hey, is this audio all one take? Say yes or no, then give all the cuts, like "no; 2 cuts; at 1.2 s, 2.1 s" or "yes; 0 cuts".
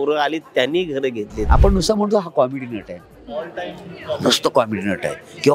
no; 1 cut; at 1.4 s